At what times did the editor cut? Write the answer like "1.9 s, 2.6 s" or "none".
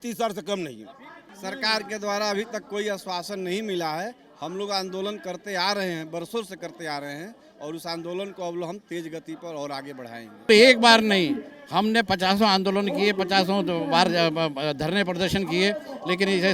1.3 s, 10.3 s